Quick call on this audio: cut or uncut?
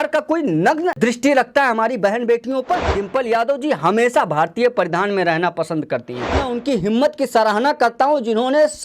cut